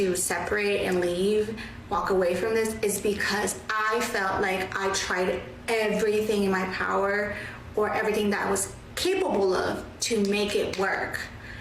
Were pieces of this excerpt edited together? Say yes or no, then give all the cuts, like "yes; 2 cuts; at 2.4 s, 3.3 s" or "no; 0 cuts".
yes; 1 cut; at 10.2 s